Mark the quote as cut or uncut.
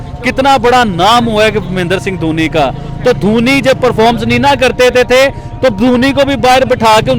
uncut